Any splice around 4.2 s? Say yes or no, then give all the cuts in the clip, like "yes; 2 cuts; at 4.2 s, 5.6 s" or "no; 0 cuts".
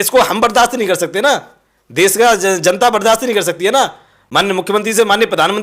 yes; 1 cut; at 4.2 s